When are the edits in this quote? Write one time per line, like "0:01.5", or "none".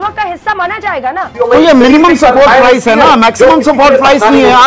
0:01.3